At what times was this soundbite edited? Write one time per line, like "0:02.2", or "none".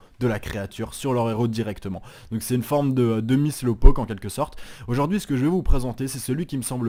none